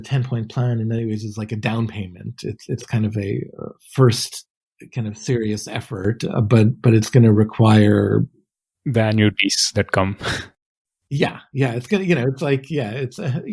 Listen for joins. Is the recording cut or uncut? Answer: uncut